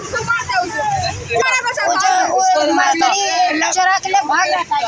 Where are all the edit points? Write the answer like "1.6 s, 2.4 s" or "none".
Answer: 1.4 s